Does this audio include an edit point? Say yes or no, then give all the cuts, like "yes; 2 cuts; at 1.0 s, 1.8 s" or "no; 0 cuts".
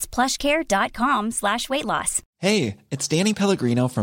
yes; 1 cut; at 2.2 s